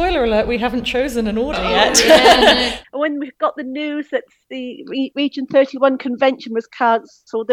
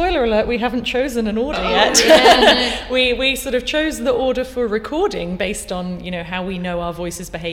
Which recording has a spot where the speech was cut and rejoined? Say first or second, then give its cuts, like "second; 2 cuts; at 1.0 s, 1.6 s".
first; 1 cut; at 2.8 s